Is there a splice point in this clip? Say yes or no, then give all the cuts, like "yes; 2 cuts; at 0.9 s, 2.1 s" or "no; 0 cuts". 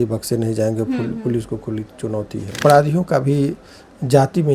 yes; 1 cut; at 2.6 s